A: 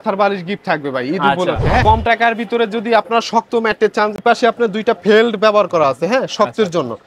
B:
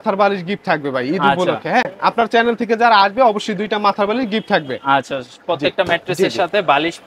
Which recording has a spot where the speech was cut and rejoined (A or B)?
A